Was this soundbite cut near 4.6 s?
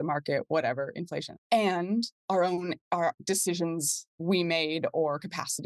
no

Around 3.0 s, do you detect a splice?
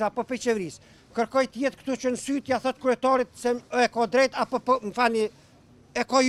no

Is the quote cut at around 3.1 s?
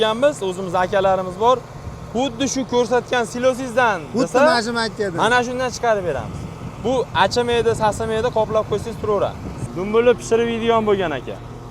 no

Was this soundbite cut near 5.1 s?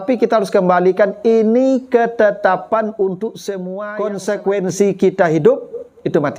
no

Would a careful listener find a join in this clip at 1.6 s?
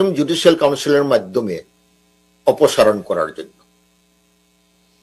no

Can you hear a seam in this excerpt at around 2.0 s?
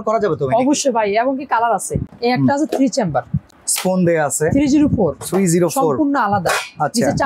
yes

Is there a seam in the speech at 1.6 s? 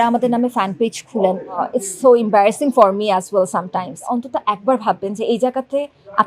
yes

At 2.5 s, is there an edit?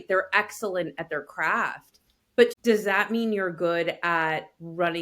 yes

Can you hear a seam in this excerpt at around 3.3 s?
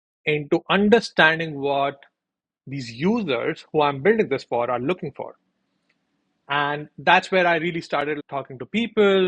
no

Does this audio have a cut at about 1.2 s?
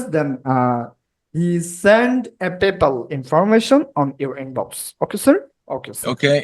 no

